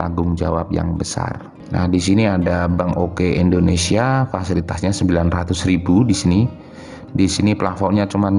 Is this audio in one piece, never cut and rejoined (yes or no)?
no